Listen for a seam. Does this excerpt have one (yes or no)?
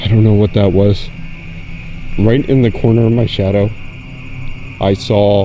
yes